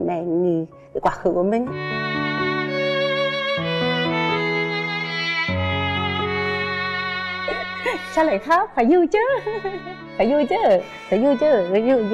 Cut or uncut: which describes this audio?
uncut